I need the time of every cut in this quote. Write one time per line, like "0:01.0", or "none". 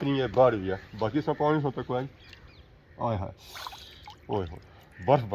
none